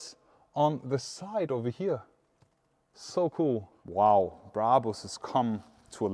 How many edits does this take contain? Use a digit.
1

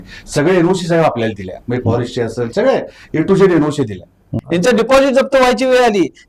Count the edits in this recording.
1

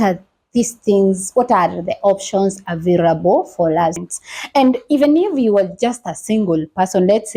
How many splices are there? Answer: 1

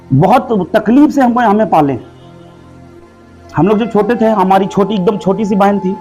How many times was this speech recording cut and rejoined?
0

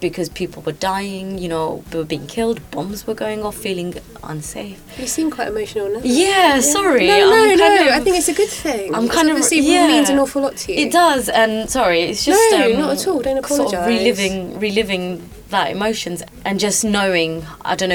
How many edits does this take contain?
0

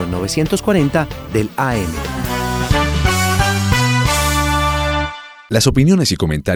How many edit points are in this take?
0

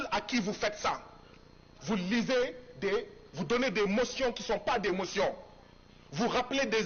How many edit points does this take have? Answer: 0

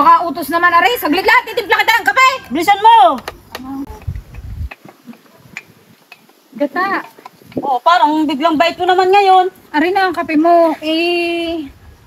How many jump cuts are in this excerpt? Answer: 1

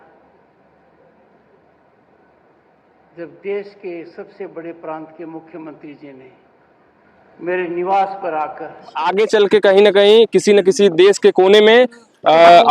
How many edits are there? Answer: 1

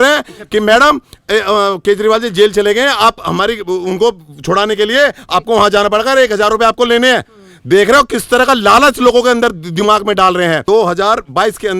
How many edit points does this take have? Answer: 1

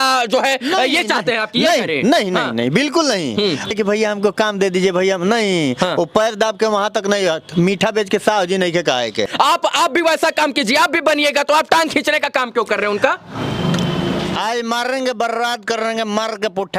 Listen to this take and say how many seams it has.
3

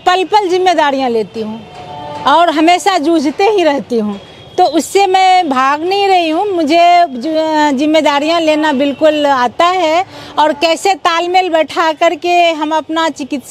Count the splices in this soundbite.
0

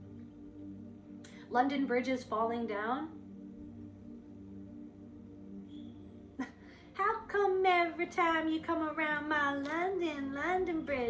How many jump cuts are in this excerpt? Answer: 2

